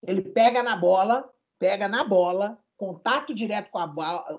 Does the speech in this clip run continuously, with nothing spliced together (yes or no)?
yes